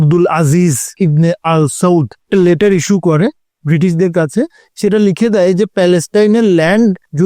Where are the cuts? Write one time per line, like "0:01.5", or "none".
0:00.9
0:02.2
0:04.6